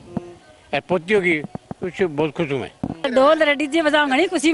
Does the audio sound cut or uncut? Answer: cut